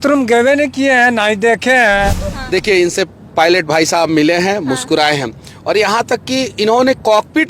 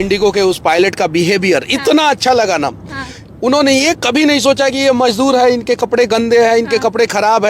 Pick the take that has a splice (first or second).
first